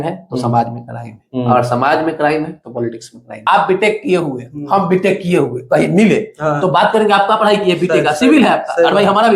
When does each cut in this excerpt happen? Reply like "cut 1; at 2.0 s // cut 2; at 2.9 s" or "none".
cut 1; at 3.4 s